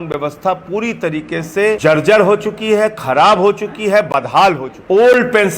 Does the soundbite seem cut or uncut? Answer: cut